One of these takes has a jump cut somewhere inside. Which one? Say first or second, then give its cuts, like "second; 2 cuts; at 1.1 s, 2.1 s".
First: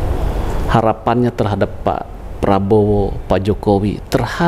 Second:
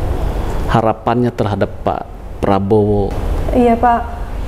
second; 1 cut; at 3.2 s